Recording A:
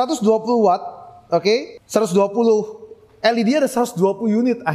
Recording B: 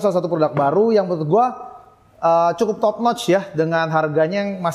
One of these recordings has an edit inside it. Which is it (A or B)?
A